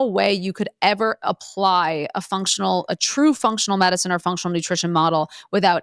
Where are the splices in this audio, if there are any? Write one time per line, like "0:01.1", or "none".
none